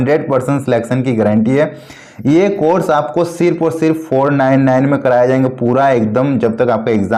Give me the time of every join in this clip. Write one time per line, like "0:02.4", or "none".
none